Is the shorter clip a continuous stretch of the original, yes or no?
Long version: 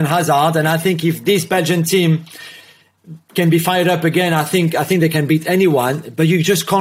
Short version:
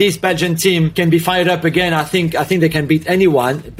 no